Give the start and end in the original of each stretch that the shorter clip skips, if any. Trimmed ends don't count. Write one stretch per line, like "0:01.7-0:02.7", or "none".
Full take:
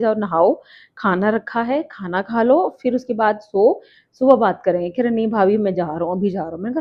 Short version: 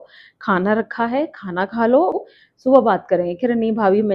0:02.8-0:03.8